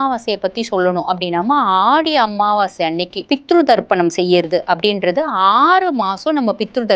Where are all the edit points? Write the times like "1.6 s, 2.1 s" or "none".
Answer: 3.1 s